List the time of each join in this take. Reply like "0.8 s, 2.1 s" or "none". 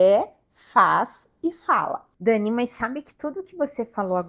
2.1 s